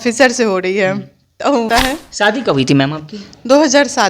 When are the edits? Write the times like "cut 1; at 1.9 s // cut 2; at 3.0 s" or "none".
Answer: cut 1; at 1.7 s

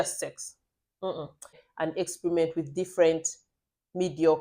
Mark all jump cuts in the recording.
cut 1; at 1.6 s

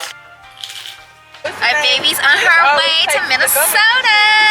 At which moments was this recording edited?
cut 1; at 1.4 s

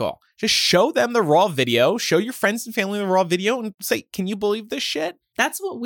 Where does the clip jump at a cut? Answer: cut 1; at 3.7 s

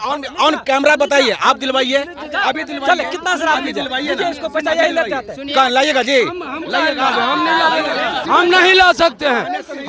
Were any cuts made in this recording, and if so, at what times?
none

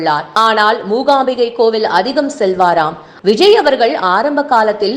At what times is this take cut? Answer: cut 1; at 3.0 s

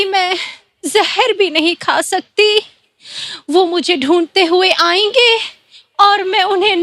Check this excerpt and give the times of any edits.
none

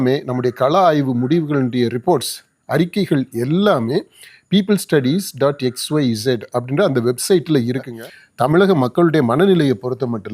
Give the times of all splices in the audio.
cut 1; at 7.9 s

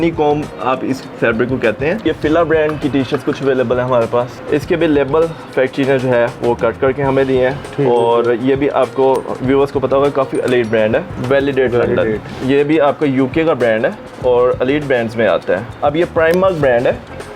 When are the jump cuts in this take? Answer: cut 1; at 2.0 s // cut 2; at 4.4 s // cut 3; at 11.1 s // cut 4; at 15.7 s

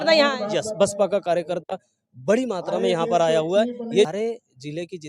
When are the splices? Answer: cut 1; at 4.1 s

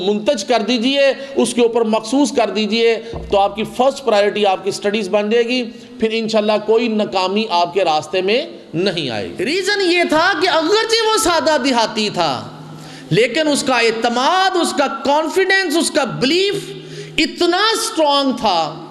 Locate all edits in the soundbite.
cut 1; at 9.3 s

